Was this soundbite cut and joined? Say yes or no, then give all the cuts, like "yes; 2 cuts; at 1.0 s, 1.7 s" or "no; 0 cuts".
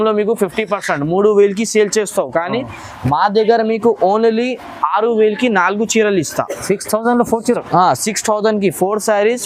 no; 0 cuts